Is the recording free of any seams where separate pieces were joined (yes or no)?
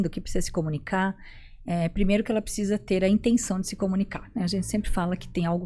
yes